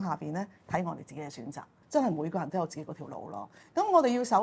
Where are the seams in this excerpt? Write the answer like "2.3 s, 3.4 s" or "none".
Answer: 1.8 s